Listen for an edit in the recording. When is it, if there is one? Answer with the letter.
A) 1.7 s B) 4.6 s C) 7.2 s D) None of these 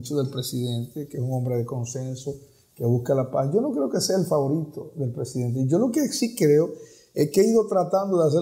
D